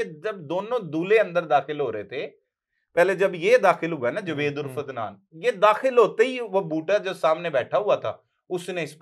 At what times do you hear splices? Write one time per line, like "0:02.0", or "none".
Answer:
none